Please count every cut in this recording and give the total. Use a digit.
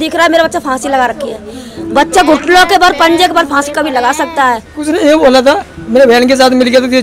1